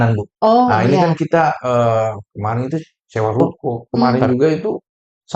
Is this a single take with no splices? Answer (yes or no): no